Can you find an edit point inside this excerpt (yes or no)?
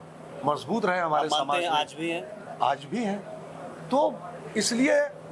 no